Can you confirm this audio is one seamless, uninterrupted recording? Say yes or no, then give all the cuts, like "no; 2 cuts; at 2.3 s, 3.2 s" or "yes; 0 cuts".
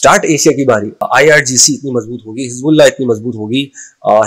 no; 1 cut; at 1.1 s